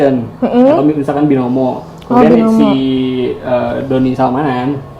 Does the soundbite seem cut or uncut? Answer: uncut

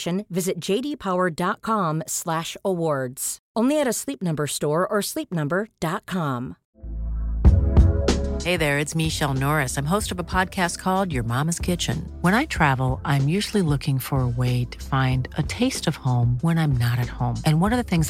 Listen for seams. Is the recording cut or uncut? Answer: cut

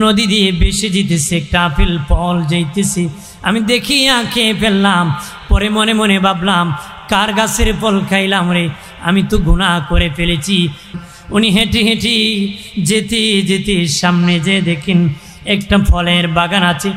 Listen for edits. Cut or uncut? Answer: cut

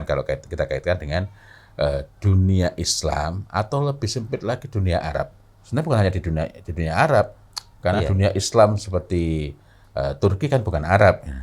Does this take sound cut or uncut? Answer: uncut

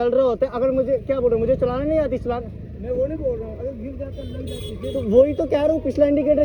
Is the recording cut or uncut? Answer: uncut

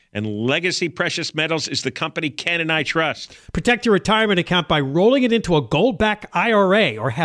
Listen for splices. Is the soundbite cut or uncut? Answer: uncut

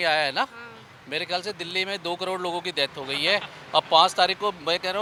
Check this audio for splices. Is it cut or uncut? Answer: uncut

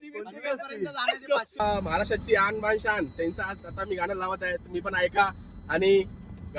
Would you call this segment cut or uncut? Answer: cut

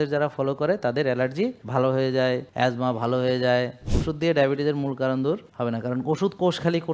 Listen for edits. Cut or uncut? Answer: cut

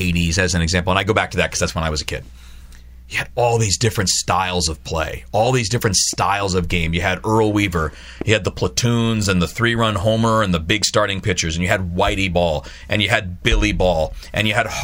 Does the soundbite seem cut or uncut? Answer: uncut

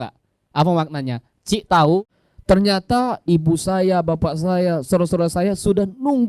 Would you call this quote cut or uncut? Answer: cut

